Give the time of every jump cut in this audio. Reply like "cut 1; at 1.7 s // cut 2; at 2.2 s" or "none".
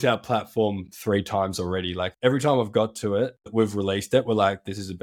cut 1; at 2.1 s // cut 2; at 3.5 s